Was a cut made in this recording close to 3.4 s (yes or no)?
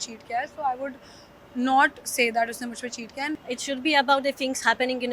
yes